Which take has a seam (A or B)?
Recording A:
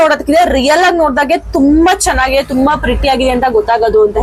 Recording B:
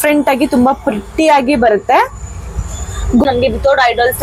B